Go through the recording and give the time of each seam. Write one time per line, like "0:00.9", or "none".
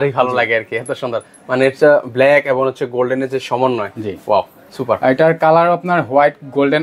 none

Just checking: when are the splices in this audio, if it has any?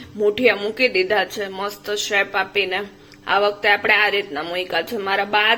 none

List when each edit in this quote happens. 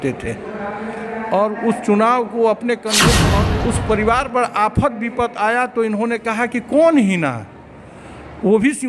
0:03.3

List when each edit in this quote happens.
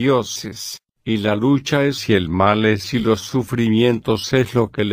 0:01.0

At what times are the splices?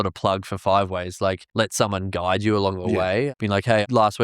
0:03.3

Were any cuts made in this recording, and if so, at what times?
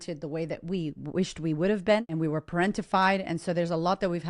0:02.1

